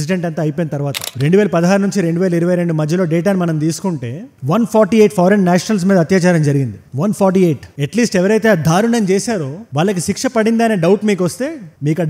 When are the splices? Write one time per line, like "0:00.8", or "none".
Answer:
0:01.0